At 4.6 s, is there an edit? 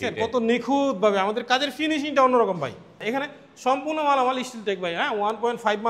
no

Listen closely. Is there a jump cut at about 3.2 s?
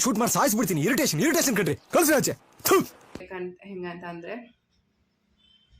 yes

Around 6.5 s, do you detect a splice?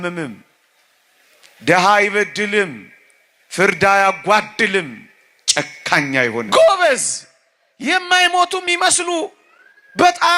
yes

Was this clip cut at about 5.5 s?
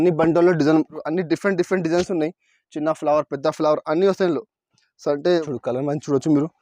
yes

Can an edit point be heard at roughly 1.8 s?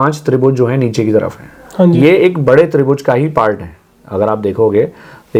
no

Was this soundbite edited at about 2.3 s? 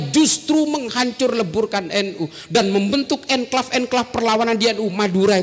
no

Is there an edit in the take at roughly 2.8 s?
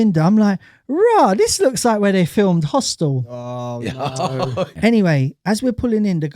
no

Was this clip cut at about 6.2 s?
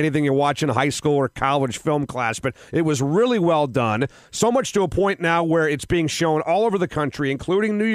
no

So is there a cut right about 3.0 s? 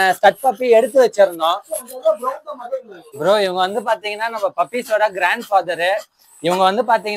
yes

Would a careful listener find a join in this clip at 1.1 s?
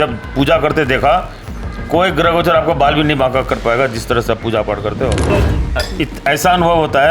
no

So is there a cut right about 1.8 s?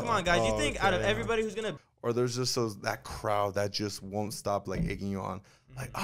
yes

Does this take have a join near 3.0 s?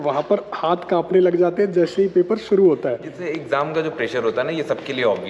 no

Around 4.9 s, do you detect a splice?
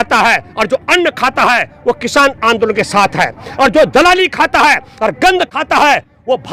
no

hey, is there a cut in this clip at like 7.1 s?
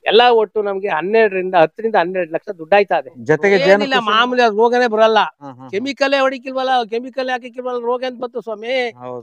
no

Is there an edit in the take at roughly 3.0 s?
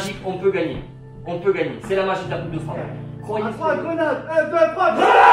yes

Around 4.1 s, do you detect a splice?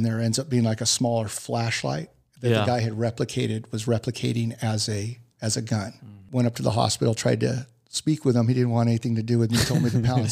no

